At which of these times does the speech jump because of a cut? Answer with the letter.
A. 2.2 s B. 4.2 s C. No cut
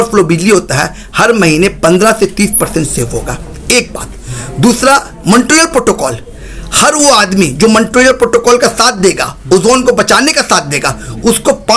C